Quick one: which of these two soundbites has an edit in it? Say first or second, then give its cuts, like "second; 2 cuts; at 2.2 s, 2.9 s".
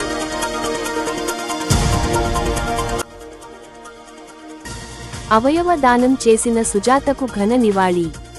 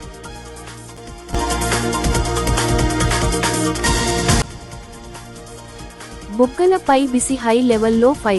second; 1 cut; at 0.9 s